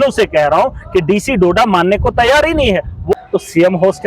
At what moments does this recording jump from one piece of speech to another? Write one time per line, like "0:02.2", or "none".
0:03.1